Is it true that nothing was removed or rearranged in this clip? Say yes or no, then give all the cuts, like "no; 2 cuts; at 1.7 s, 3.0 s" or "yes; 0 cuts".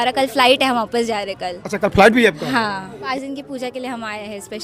no; 1 cut; at 3.0 s